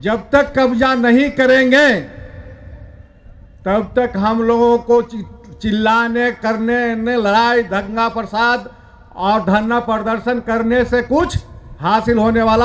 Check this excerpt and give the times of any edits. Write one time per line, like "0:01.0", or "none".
none